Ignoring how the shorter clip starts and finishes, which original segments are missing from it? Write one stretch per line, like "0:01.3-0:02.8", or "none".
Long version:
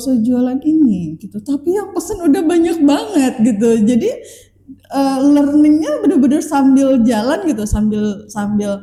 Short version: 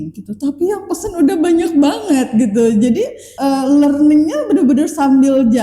0:04.3-0:04.8